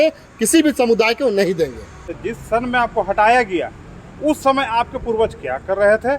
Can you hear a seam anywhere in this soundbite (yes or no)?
yes